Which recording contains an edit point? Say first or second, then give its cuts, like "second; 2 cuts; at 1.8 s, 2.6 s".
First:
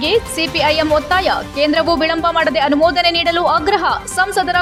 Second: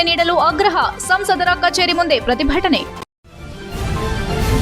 second; 1 cut; at 3.0 s